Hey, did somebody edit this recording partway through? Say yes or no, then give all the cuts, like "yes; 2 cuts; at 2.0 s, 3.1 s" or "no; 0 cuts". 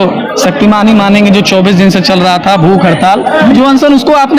no; 0 cuts